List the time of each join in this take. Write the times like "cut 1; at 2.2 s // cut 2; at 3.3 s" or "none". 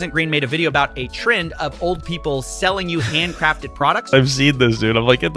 cut 1; at 4.1 s